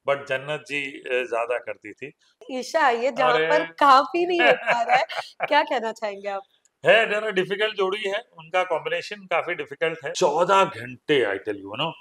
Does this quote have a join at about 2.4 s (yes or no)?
yes